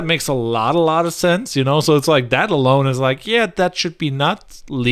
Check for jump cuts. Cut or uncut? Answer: uncut